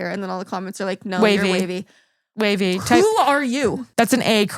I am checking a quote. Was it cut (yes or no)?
no